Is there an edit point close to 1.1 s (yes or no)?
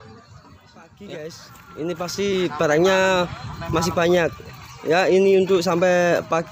yes